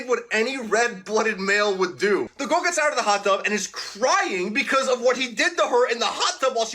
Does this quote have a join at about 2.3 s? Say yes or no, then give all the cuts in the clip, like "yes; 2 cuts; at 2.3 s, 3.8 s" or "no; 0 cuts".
yes; 1 cut; at 2.3 s